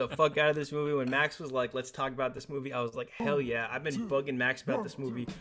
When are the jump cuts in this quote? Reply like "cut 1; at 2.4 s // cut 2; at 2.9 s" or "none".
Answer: none

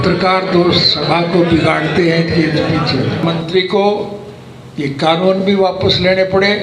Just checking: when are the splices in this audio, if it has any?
cut 1; at 3.2 s

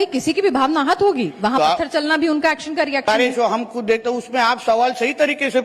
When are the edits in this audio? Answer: cut 1; at 3.0 s

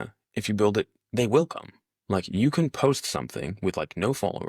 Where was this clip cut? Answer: none

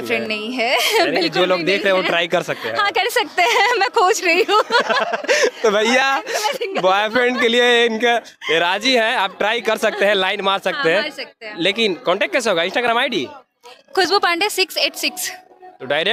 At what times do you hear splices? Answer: none

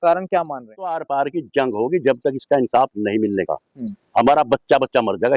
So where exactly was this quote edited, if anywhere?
cut 1; at 1.0 s

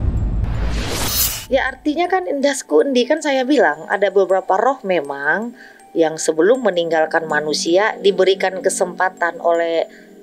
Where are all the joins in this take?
cut 1; at 1.3 s

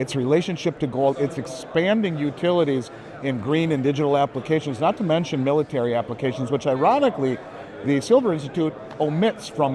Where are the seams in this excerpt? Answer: none

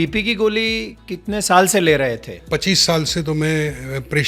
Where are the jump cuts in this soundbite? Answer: cut 1; at 0.9 s // cut 2; at 2.4 s

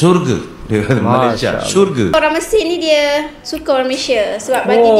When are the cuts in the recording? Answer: cut 1; at 2.1 s

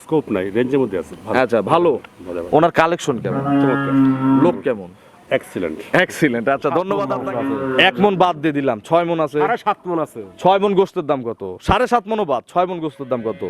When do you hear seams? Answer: cut 1; at 7.1 s

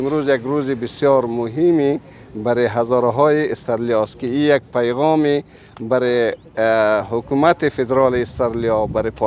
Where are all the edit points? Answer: none

